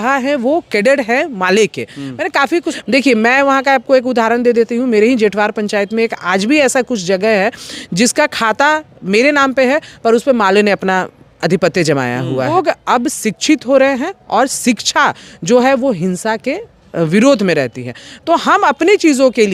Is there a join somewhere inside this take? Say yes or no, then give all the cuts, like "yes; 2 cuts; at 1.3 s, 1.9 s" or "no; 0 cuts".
yes; 2 cuts; at 2.7 s, 12.5 s